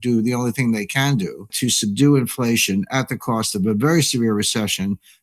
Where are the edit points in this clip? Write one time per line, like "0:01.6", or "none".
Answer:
0:01.5